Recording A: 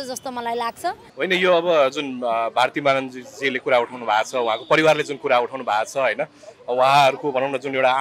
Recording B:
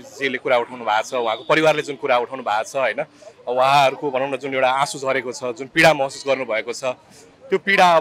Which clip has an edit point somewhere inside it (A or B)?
A